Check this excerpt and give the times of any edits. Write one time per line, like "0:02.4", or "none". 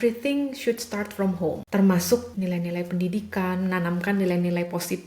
0:01.6
0:02.3